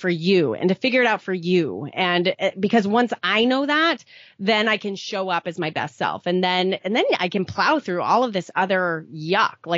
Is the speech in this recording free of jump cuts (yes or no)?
yes